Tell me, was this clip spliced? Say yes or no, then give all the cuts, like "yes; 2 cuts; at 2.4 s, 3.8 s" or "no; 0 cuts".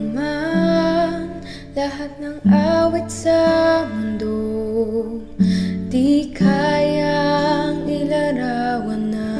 no; 0 cuts